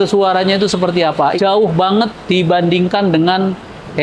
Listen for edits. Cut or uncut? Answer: cut